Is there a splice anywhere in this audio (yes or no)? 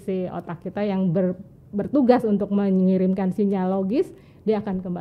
no